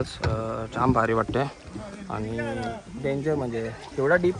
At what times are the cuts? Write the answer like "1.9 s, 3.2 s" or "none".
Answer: none